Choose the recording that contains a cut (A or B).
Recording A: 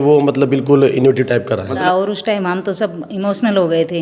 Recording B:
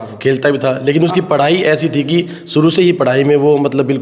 A